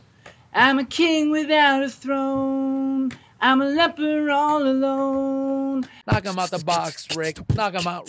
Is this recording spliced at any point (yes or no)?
yes